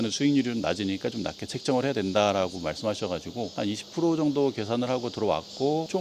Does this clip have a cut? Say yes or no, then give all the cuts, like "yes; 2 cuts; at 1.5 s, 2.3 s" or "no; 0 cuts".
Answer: no; 0 cuts